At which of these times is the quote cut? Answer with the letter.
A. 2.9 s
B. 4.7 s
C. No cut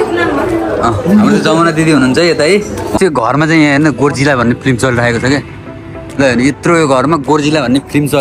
A